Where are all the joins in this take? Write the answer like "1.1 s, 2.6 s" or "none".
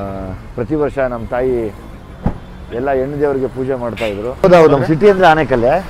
4.4 s